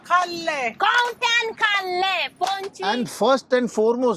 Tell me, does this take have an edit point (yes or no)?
yes